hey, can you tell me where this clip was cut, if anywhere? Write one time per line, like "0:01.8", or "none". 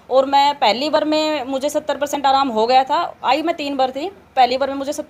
none